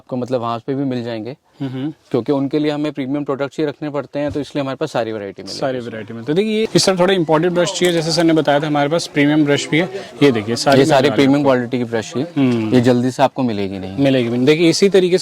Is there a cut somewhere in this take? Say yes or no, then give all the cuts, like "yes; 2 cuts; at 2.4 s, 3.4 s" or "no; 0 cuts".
yes; 1 cut; at 6.6 s